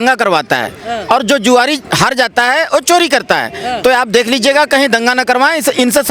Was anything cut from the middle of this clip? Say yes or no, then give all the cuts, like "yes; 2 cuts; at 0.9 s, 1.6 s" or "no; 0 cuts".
no; 0 cuts